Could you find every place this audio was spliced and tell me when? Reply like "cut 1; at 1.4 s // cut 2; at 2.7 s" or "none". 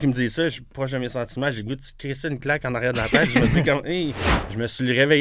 cut 1; at 4.3 s